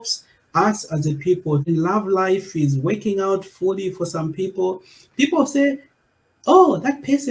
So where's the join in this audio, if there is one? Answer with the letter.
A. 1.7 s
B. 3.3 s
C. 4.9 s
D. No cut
A